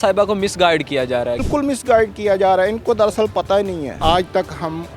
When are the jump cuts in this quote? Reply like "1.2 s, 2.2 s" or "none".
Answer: 1.4 s, 3.9 s